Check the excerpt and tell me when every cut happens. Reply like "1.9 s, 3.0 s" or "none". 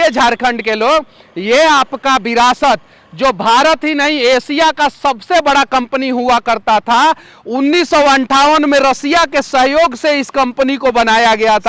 none

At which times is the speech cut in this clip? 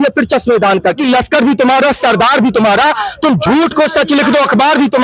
1.0 s

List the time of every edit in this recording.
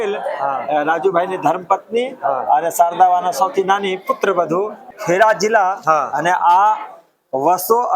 4.8 s

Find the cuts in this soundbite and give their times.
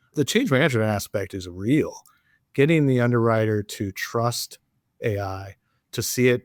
none

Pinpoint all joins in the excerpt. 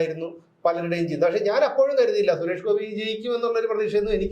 none

